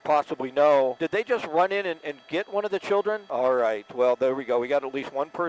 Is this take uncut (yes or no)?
no